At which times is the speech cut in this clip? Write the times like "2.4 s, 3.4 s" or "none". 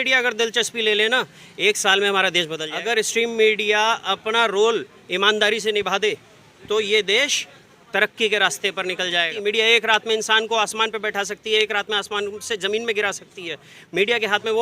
2.6 s, 9.3 s